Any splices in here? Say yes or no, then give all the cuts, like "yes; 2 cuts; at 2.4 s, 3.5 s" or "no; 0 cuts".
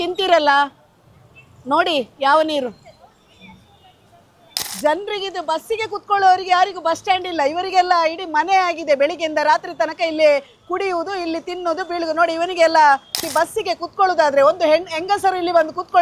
yes; 2 cuts; at 4.6 s, 13.2 s